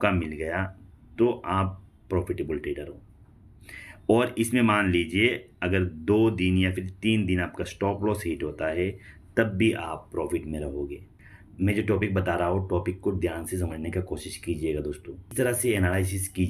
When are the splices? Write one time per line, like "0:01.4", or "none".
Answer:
0:15.3